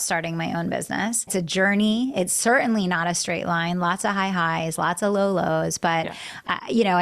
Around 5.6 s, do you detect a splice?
no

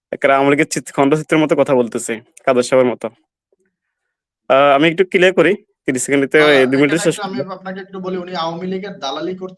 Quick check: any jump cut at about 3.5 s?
no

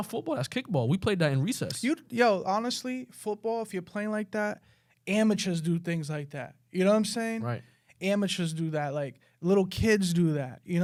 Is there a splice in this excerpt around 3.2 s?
no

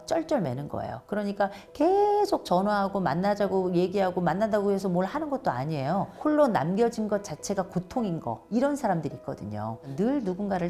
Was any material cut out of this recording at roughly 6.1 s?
yes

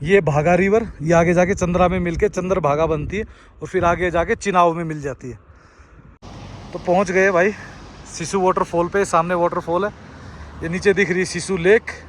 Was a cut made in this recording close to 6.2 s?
yes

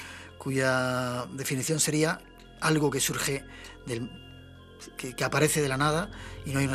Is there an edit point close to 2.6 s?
no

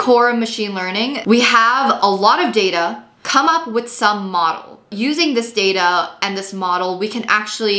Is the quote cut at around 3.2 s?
yes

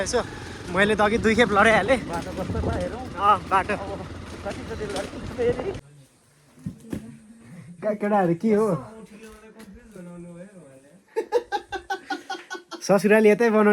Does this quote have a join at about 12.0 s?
no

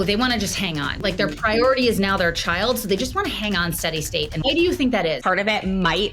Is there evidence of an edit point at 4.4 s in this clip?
yes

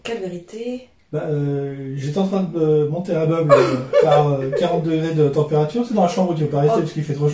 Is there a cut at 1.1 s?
no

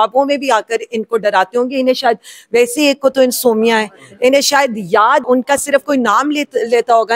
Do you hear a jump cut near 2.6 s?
no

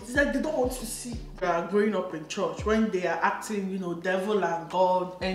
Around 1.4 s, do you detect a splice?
yes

